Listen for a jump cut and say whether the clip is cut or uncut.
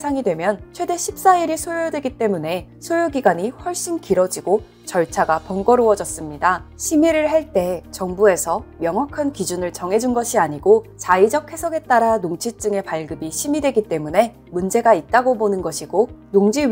cut